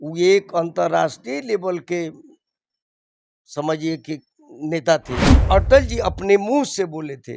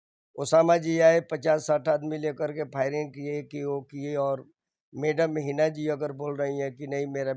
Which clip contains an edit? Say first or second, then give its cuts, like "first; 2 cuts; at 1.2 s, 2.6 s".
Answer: first; 1 cut; at 5.4 s